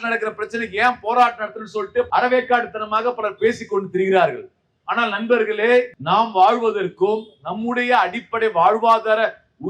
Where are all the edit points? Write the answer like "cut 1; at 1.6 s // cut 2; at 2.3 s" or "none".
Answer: cut 1; at 2.1 s // cut 2; at 5.9 s